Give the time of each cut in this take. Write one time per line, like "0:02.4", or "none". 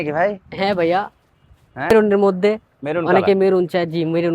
0:02.0